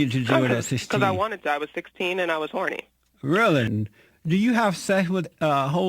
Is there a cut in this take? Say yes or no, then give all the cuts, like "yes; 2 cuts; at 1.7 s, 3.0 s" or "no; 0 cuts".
yes; 1 cut; at 3.7 s